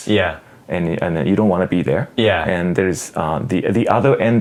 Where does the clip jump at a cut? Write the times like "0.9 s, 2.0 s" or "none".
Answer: none

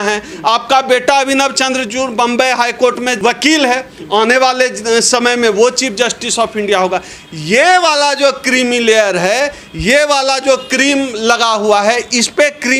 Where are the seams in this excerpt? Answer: 3.2 s

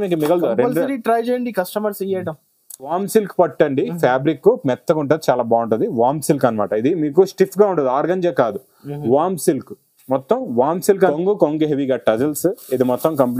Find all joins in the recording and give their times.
2.9 s, 11.1 s

